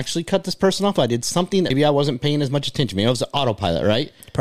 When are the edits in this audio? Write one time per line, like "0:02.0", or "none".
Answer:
0:01.7